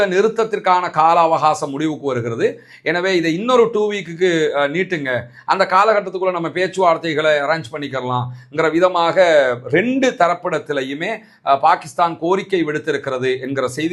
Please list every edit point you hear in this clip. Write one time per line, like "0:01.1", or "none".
none